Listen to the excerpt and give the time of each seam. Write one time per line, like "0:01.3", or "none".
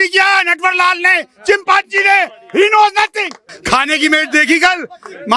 0:03.5